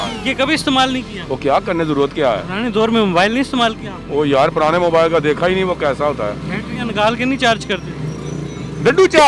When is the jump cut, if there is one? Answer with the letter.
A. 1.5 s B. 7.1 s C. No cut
C